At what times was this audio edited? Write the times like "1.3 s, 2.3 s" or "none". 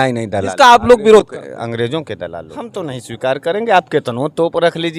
2.6 s